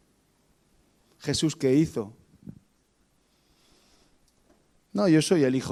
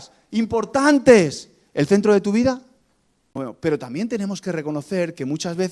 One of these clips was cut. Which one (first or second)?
second